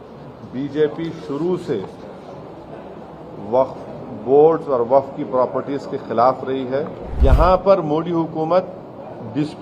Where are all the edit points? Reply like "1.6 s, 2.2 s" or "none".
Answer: 7.0 s